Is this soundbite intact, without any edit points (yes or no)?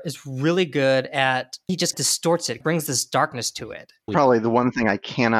no